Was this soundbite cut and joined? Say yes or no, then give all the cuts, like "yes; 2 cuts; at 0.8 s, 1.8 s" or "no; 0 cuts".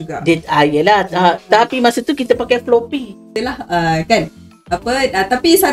yes; 1 cut; at 3.5 s